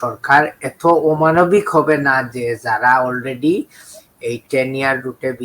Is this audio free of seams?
yes; 0 cuts

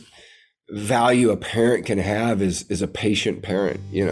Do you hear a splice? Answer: no; 0 cuts

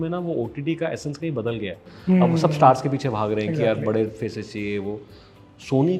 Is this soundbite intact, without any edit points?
yes; 0 cuts

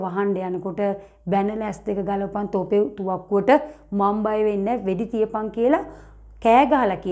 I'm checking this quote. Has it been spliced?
no; 0 cuts

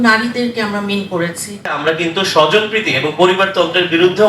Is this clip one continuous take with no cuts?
no; 1 cut; at 1.7 s

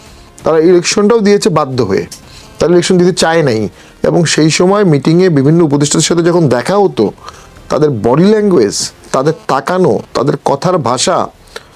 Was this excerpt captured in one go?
yes; 0 cuts

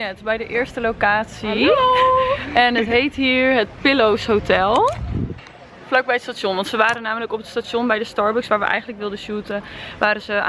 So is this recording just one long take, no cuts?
yes; 0 cuts

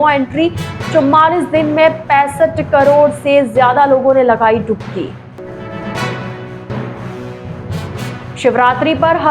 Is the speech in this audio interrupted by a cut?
no; 0 cuts

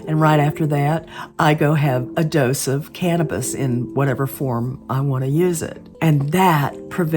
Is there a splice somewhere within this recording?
yes; 2 cuts; at 2.1 s, 5.9 s

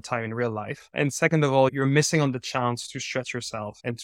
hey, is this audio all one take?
yes; 0 cuts

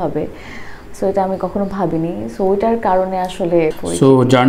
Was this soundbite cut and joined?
no; 0 cuts

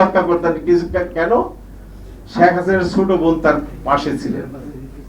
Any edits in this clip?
no; 0 cuts

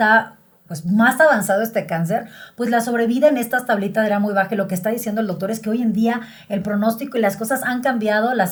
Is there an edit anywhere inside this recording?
no; 0 cuts

